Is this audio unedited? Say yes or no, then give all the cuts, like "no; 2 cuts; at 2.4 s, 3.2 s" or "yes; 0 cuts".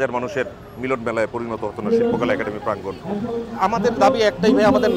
no; 1 cut; at 3.6 s